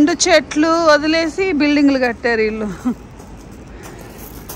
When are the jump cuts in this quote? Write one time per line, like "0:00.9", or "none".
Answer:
none